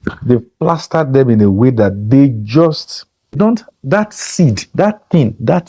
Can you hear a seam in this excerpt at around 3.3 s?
yes; 1 cut; at 3.3 s

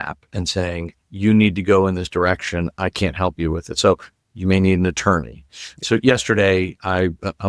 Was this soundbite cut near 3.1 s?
no; 1 cut; at 5.7 s

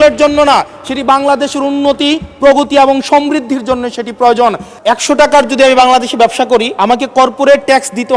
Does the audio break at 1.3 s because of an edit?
no; 2 cuts; at 4.7 s, 6.7 s

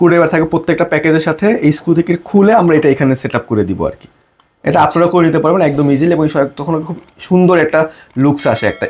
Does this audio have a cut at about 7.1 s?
no; 0 cuts

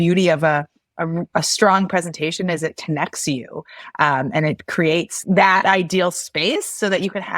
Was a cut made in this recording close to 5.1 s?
yes; 1 cut; at 5.1 s

